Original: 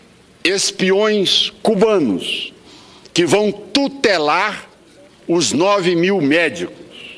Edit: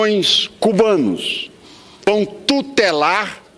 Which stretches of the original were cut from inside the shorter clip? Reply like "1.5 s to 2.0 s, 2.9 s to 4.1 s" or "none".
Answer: 3.1 s to 3.3 s